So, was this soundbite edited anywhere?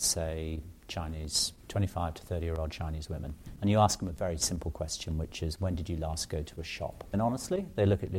yes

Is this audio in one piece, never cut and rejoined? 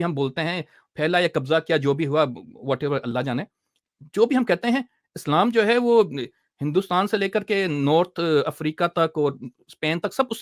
yes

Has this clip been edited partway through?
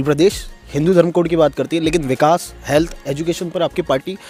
no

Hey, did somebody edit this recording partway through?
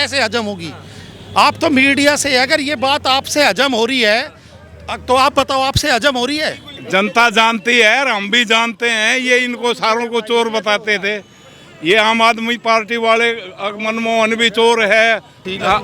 yes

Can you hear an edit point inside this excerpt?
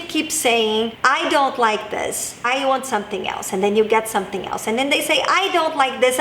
yes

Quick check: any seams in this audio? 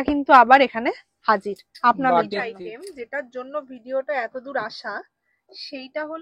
yes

